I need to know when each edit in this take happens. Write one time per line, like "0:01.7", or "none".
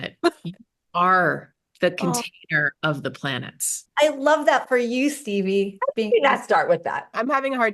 0:03.8